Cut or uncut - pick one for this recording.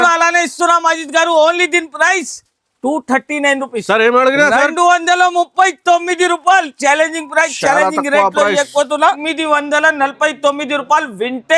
cut